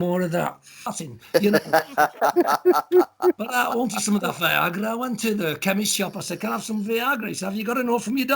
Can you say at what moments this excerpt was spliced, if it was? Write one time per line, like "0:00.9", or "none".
0:01.0